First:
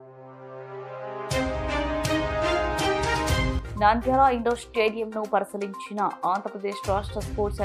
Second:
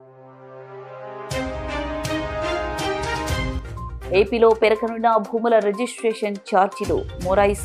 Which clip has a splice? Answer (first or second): second